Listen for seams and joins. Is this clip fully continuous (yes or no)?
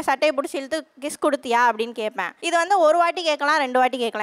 no